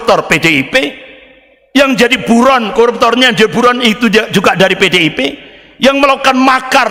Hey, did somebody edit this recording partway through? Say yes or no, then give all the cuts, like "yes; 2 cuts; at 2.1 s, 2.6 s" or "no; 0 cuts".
no; 0 cuts